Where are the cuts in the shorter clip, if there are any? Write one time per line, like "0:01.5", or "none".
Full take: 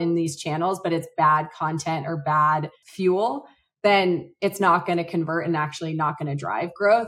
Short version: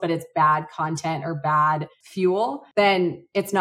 0:02.6

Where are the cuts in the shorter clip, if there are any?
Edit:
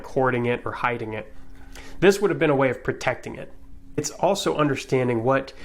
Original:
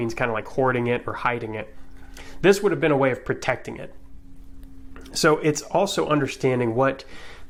0:04.0

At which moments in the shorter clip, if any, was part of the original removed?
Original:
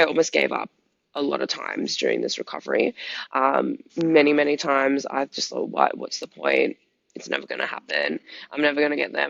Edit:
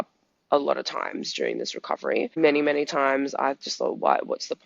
0:02.4

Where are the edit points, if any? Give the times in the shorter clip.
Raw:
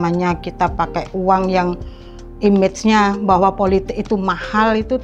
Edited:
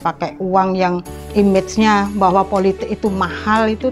0:01.1

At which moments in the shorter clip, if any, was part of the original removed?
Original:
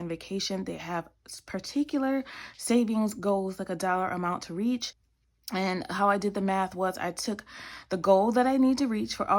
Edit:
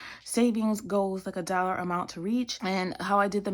0:02.6

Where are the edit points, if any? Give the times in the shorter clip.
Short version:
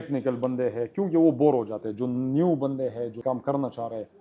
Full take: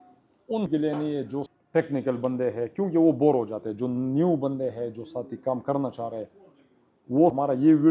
0:03.2

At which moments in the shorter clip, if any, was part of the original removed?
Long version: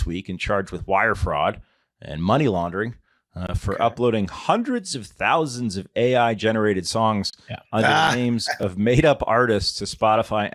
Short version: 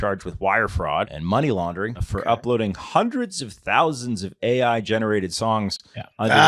0:01.2
0:02.1

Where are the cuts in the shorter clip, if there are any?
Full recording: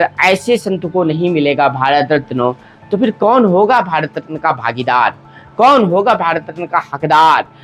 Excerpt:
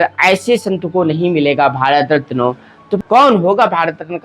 0:03.0

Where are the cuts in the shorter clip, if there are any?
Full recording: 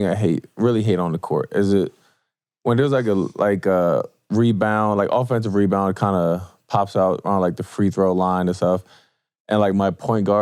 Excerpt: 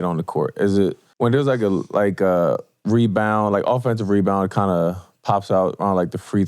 0:01.0

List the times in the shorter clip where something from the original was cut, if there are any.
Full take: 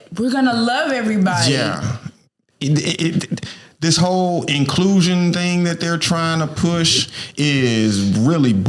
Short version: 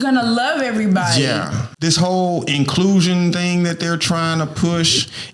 0:01.6

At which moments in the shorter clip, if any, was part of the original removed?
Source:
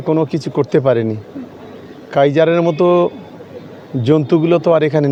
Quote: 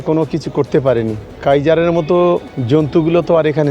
0:01.2
0:02.5

